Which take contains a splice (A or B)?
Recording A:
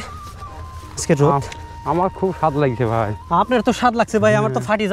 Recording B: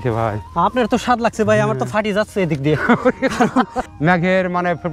B